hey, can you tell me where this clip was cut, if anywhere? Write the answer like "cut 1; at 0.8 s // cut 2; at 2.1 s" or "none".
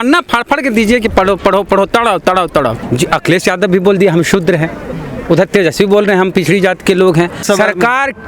cut 1; at 2.8 s // cut 2; at 7.4 s

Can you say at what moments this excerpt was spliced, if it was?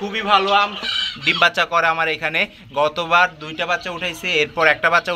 cut 1; at 0.9 s

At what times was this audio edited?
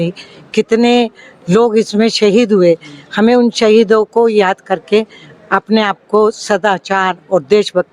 none

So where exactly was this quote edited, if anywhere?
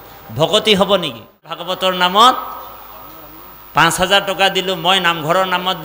cut 1; at 1.5 s

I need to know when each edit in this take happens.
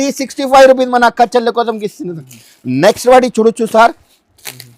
none

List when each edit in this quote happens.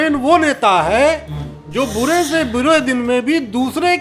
none

